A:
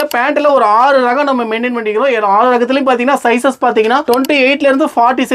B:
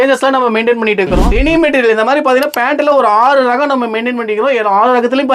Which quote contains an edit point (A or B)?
B